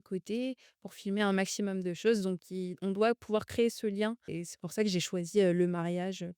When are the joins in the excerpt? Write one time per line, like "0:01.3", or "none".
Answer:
0:04.4

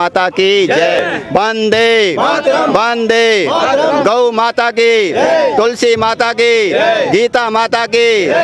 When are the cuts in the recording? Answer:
0:00.9

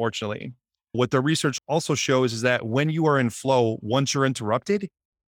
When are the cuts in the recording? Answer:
0:01.0

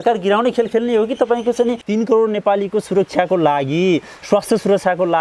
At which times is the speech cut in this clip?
0:01.8

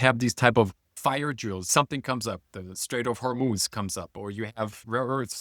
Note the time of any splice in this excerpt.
0:01.2

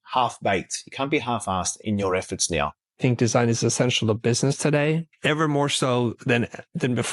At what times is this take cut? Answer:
0:01.8
0:03.0
0:05.1

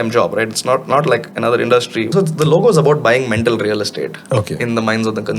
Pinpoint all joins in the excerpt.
0:02.0

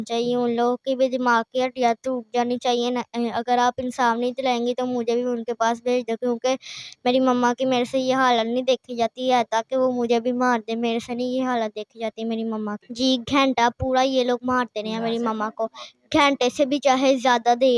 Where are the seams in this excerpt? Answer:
0:12.8

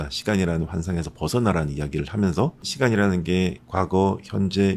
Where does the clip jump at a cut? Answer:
0:02.7
0:03.6

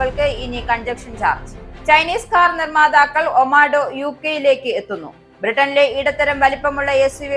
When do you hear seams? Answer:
none

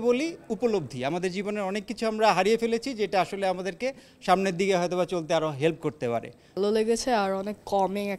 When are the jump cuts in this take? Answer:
0:06.5

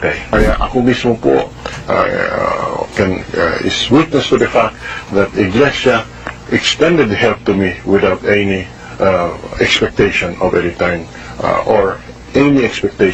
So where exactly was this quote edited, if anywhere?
none

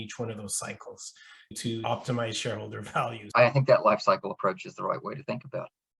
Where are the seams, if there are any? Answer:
0:03.2

